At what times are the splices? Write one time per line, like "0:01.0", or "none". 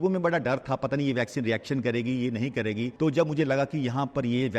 0:02.9